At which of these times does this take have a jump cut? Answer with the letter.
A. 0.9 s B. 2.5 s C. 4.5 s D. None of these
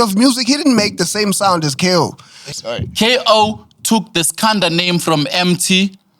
B